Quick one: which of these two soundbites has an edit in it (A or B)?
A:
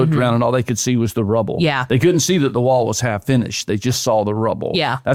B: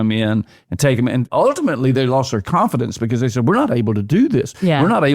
B